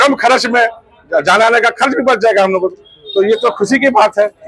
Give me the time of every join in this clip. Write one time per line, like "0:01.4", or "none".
none